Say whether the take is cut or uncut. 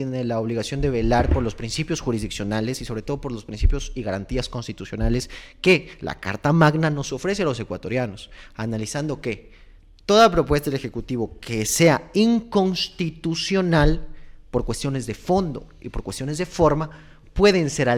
uncut